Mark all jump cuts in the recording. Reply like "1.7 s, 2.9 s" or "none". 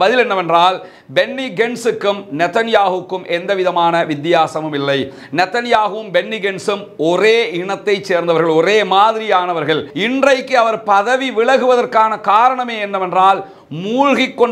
9.9 s